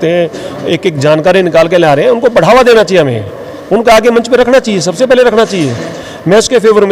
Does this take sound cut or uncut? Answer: uncut